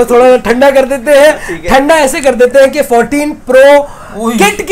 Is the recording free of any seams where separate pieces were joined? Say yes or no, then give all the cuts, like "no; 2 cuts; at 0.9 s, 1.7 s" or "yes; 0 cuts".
yes; 0 cuts